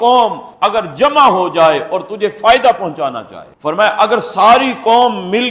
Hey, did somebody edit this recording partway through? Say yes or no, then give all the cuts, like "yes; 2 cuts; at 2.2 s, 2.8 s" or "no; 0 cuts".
no; 0 cuts